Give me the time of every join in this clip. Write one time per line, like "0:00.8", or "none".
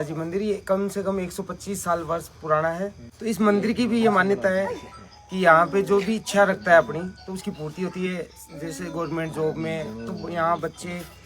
0:03.1